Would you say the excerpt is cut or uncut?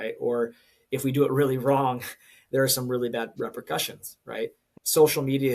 cut